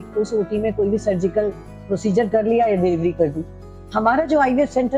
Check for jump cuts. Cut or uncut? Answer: uncut